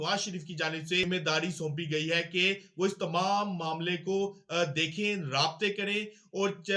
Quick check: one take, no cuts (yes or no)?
no